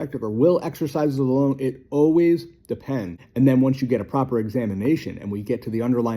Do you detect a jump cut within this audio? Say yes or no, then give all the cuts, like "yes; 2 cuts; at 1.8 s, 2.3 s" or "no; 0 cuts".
yes; 1 cut; at 3.2 s